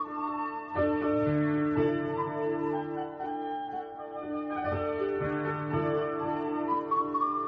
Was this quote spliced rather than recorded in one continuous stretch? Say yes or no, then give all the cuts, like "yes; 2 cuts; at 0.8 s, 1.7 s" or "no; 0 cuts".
yes; 1 cut; at 4.3 s